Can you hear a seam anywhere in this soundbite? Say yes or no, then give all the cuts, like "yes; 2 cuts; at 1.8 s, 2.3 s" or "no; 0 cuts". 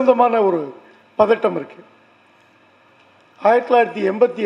yes; 1 cut; at 2.9 s